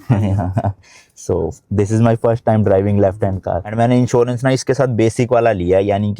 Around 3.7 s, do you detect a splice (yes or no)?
yes